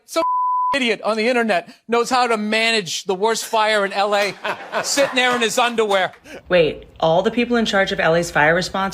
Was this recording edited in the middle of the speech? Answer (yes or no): yes